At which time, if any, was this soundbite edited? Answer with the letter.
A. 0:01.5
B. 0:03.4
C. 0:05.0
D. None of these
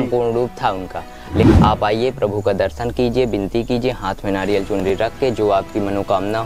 A